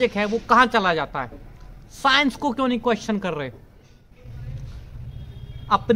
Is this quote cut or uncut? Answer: uncut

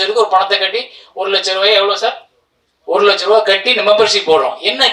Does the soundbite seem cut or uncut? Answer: uncut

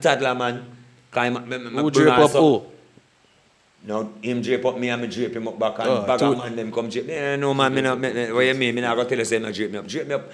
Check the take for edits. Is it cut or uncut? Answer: uncut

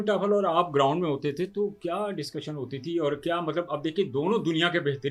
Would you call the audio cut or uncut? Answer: uncut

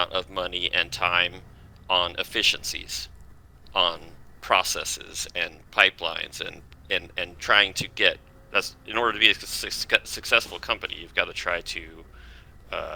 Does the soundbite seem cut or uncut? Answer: uncut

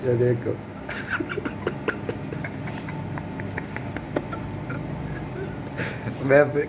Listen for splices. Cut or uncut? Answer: uncut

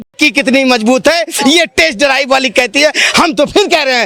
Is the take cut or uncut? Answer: uncut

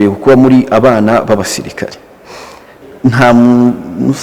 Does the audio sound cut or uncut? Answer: cut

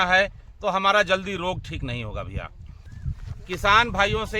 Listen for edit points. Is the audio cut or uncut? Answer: cut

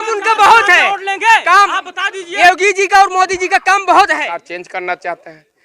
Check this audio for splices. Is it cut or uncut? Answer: cut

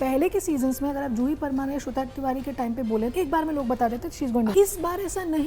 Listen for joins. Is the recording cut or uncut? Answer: cut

